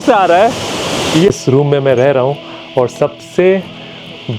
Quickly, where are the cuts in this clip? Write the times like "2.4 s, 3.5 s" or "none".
1.3 s